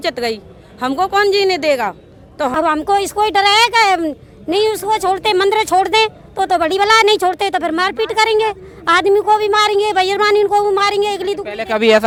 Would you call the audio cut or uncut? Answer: uncut